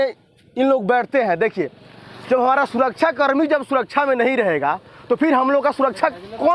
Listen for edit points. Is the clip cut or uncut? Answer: uncut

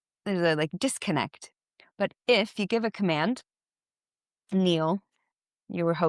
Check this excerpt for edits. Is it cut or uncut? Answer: uncut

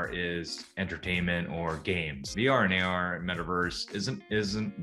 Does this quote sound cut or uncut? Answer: cut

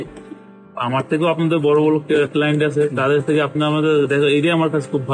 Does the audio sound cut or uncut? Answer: uncut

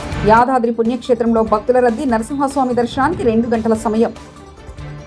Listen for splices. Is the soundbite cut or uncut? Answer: uncut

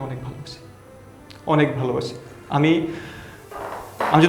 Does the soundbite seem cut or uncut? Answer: uncut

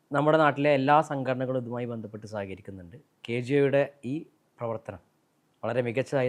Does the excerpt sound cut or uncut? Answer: uncut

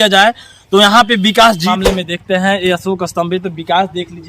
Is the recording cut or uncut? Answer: cut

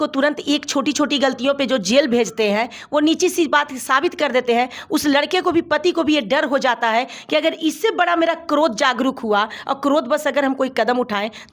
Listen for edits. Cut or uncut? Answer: uncut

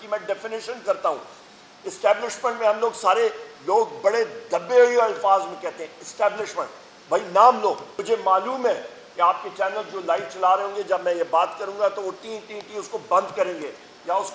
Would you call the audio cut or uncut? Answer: cut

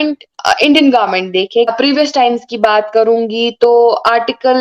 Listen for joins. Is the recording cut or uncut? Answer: cut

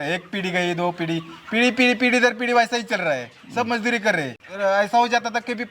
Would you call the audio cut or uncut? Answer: cut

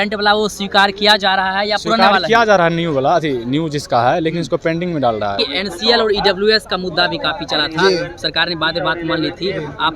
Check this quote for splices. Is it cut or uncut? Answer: cut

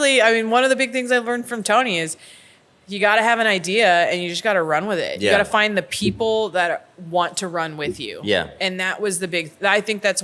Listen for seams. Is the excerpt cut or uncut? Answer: uncut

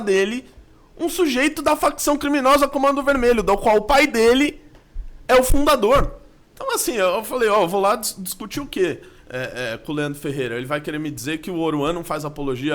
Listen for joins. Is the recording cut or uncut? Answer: uncut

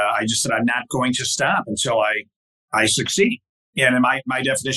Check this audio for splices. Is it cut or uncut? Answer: uncut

